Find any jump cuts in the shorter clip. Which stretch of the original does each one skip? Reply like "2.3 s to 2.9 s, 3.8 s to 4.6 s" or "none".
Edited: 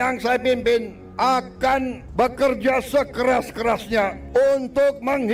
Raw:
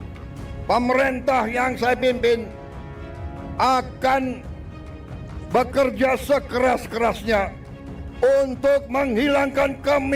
2.6 s to 3.4 s, 4.4 s to 5.4 s, 7.6 s to 8.1 s